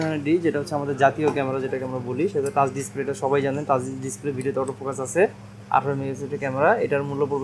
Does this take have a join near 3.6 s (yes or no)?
no